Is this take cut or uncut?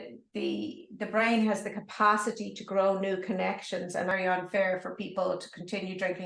cut